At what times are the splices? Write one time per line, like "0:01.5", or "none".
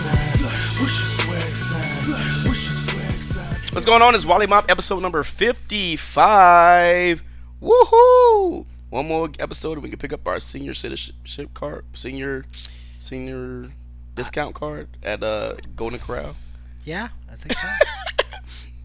0:03.7